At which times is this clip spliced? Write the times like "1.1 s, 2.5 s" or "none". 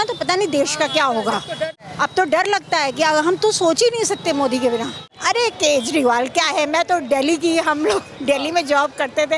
1.8 s, 5.0 s